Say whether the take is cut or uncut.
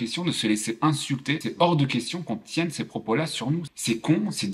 cut